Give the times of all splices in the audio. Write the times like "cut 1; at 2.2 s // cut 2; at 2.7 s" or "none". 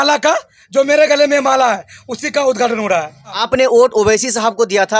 cut 1; at 3.3 s